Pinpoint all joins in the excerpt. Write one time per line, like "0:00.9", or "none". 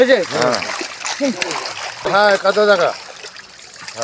0:02.1